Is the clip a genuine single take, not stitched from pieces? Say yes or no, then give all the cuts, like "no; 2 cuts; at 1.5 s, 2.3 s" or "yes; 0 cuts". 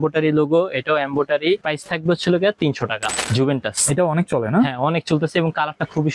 no; 2 cuts; at 1.6 s, 3.2 s